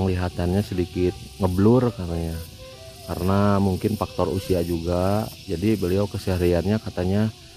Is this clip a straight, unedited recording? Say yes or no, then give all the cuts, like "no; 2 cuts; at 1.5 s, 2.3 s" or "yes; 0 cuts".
yes; 0 cuts